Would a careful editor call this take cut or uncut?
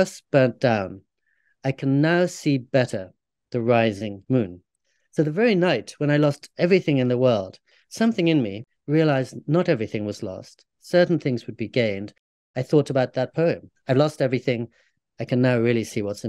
cut